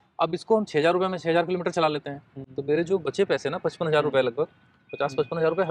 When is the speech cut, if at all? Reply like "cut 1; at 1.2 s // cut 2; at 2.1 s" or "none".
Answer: none